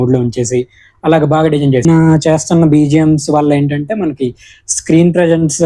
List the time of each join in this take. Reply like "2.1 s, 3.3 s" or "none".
1.8 s